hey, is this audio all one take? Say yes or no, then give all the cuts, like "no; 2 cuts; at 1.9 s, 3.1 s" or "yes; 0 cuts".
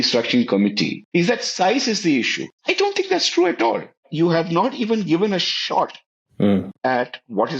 no; 3 cuts; at 1.0 s, 2.4 s, 4.0 s